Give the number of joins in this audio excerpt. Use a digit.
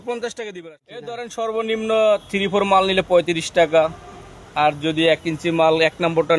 1